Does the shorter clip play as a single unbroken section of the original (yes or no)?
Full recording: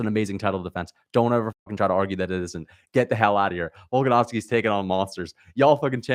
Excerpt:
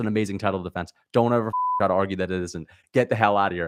yes